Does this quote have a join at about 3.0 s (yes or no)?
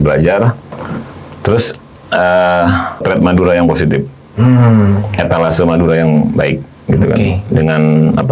yes